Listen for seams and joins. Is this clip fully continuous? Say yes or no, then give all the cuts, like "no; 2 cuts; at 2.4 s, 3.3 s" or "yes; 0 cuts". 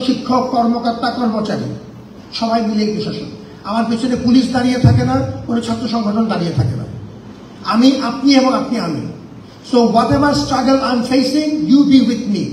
yes; 0 cuts